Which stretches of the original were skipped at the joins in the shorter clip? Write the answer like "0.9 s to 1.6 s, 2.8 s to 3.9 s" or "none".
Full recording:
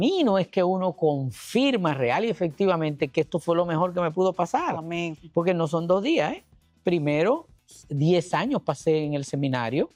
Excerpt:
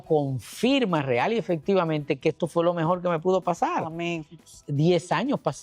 5.2 s to 7.5 s

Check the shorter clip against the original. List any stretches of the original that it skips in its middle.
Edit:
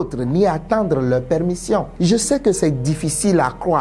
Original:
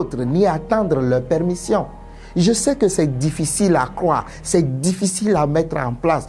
1.9 s to 2.3 s

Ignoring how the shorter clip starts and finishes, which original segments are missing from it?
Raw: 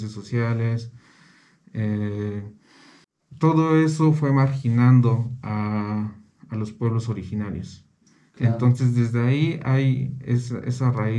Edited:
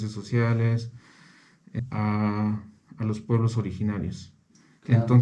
1.7 s to 5.3 s

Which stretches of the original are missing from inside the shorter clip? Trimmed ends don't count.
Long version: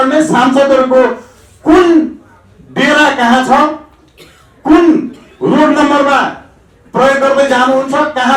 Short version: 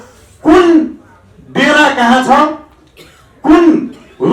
none

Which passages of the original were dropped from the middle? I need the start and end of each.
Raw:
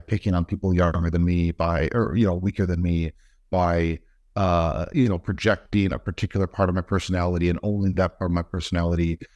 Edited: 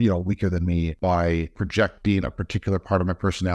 3.6 s to 5.1 s

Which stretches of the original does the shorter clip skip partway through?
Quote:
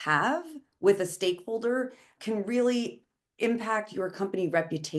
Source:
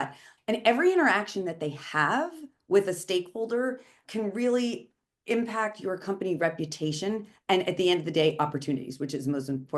none

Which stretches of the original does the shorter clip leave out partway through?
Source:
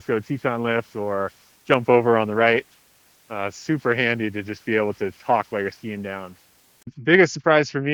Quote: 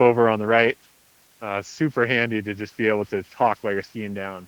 none

